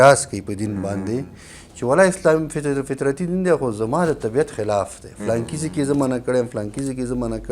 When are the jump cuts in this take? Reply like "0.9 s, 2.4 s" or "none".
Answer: none